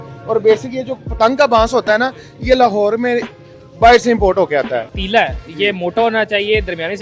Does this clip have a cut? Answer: yes; 1 cut; at 4.9 s

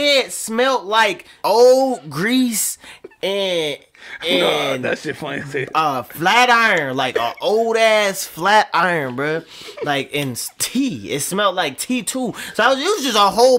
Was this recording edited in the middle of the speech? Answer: yes; 1 cut; at 1.3 s

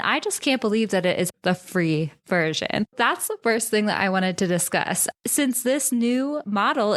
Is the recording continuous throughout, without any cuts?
no; 3 cuts; at 1.3 s, 2.9 s, 5.1 s

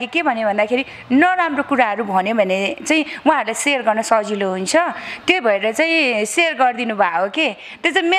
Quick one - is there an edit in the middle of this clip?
no; 0 cuts

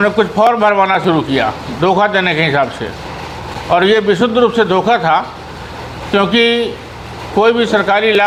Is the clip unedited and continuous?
yes; 0 cuts

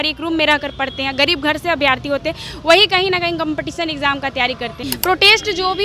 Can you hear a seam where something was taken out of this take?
yes; 1 cut; at 4.8 s

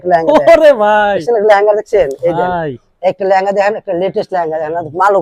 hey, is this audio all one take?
yes; 0 cuts

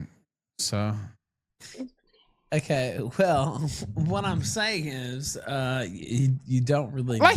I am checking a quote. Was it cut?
yes; 1 cut; at 1.5 s

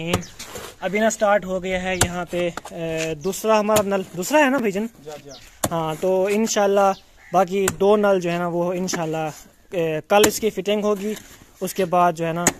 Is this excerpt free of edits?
yes; 0 cuts

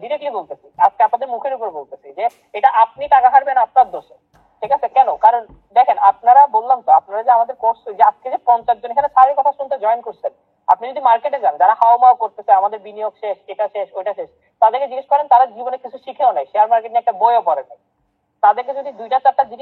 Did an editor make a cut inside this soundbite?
no; 0 cuts

